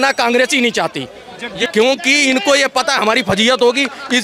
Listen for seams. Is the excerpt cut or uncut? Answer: cut